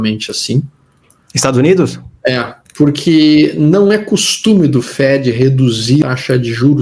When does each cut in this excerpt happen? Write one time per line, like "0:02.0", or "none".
0:02.6
0:06.0